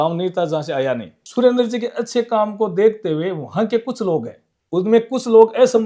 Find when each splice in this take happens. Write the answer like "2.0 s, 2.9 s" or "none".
1.1 s